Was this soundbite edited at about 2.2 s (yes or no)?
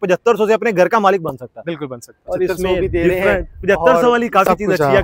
yes